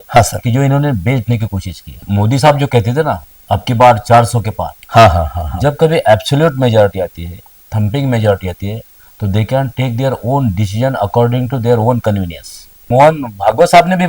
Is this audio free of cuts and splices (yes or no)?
no